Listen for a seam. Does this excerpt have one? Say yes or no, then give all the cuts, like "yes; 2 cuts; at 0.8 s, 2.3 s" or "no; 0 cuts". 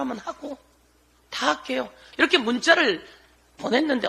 yes; 1 cut; at 2.0 s